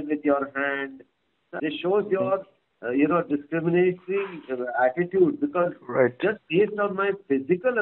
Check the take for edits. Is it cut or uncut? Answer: cut